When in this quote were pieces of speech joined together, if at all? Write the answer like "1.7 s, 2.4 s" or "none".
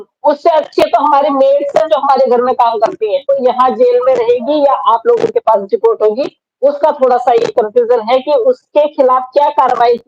3.3 s